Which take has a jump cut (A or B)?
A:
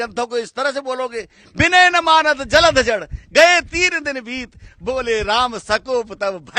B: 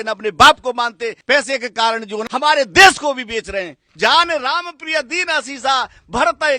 B